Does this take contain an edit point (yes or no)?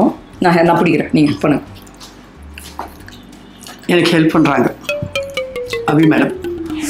no